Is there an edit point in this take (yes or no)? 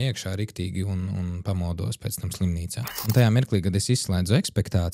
yes